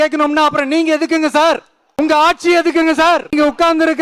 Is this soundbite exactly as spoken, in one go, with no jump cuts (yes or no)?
no